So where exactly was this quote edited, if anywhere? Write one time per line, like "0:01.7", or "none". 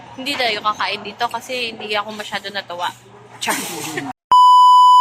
0:04.1